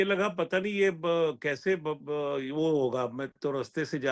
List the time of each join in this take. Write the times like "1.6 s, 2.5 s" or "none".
none